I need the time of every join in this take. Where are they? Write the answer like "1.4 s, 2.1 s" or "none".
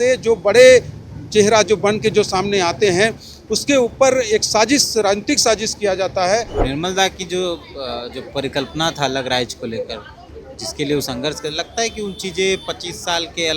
6.6 s